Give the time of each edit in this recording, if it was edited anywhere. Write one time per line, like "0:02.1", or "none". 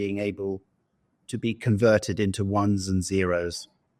none